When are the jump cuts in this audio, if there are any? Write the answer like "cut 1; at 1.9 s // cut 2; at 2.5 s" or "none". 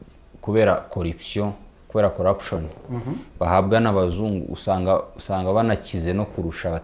none